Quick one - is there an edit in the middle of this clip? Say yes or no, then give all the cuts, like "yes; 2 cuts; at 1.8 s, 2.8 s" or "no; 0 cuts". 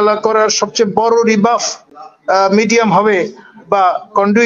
no; 0 cuts